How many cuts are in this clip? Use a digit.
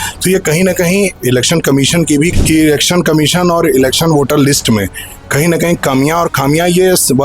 1